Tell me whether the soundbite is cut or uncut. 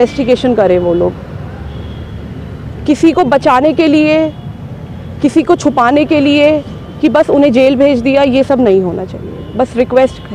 uncut